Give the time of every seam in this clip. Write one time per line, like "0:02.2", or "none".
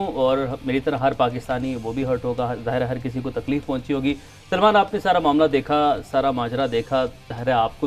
none